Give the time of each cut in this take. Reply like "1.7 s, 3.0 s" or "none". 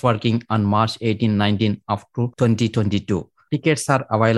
2.3 s